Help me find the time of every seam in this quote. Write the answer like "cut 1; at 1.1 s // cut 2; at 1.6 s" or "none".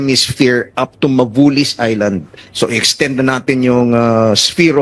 none